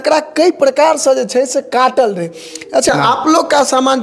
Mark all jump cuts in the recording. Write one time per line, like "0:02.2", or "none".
0:02.9